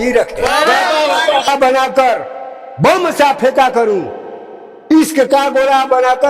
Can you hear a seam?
yes; 1 cut; at 1.5 s

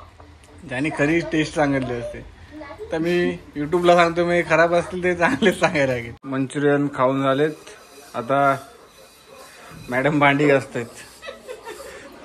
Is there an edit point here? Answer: yes; 1 cut; at 6.4 s

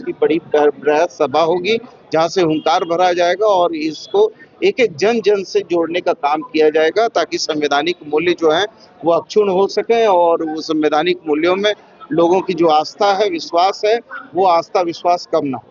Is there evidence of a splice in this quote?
no; 0 cuts

